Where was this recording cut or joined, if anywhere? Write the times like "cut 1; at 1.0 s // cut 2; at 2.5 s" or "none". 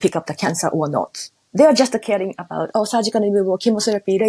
none